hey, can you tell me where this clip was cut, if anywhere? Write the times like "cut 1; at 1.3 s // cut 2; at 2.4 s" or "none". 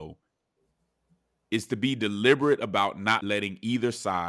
cut 1; at 3.2 s